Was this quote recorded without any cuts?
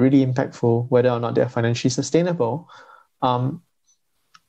yes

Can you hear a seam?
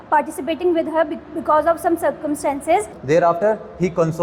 yes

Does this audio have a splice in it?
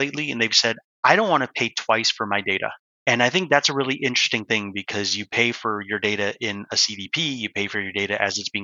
yes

